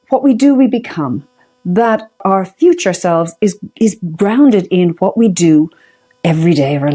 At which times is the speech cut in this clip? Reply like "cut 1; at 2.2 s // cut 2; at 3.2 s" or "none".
cut 1; at 2.2 s